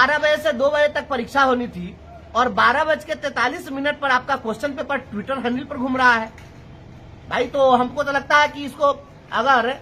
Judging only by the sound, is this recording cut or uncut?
uncut